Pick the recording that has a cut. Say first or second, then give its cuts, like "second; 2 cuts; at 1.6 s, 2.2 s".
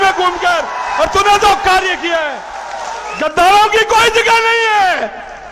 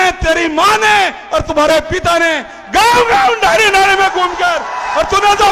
first; 1 cut; at 3.1 s